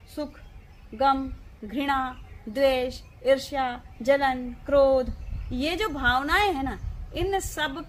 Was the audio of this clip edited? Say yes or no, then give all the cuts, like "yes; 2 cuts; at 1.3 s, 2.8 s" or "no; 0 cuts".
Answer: no; 0 cuts